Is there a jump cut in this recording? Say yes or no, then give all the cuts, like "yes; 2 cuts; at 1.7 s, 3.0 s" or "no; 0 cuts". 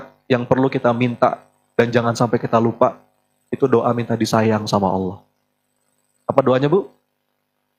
no; 0 cuts